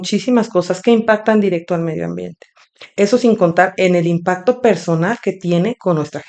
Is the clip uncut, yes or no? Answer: yes